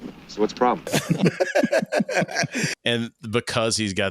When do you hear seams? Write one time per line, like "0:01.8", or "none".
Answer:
0:00.9
0:02.7

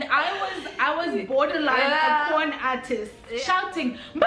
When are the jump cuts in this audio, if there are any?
0:03.1

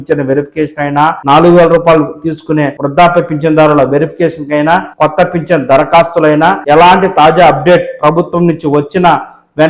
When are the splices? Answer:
0:01.2
0:02.8
0:04.9
0:06.6

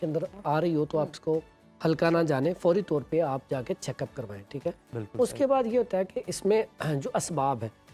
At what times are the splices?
none

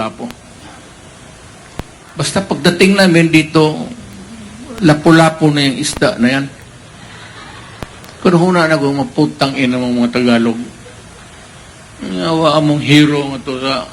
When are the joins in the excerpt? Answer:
0:02.3

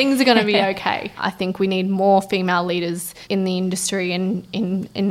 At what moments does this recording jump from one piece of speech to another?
0:01.1
0:03.2

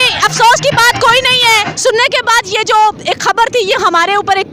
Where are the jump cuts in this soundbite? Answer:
0:01.7

